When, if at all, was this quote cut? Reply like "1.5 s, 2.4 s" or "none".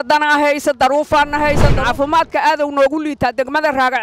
1.8 s

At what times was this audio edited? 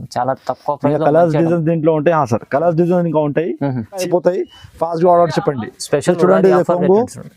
4.0 s

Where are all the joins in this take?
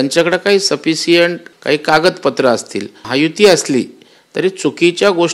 1.5 s, 3.0 s

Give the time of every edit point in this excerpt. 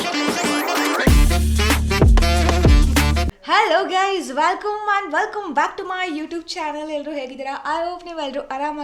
3.3 s

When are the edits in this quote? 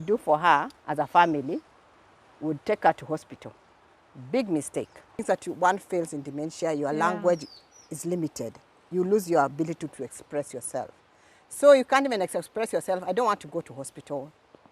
5.2 s

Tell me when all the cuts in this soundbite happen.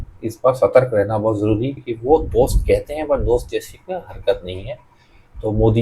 1.8 s

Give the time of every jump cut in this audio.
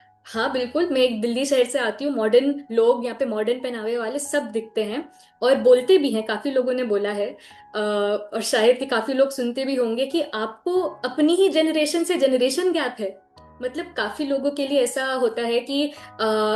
none

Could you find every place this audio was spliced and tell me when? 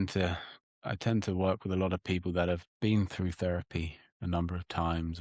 none

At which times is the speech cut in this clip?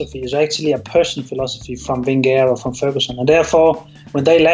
none

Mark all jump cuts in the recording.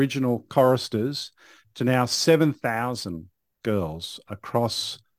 none

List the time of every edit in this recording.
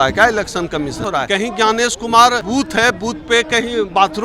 1.1 s, 2.4 s

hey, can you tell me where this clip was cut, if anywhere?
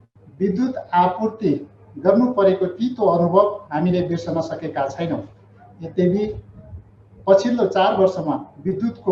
none

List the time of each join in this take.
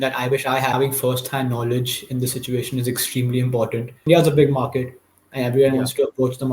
0.7 s, 4.1 s

